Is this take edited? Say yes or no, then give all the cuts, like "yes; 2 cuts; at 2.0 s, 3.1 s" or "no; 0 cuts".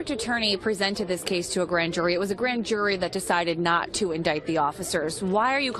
no; 0 cuts